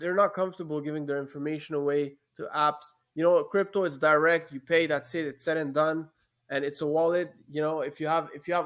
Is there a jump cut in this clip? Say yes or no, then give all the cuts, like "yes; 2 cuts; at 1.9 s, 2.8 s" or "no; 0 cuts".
no; 0 cuts